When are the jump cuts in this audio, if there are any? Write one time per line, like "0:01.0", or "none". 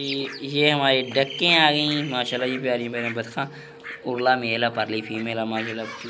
none